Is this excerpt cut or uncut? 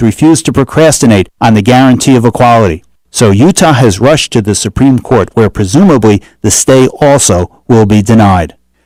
uncut